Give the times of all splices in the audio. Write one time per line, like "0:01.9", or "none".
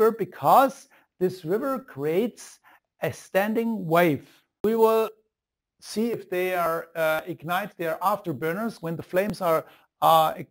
0:04.6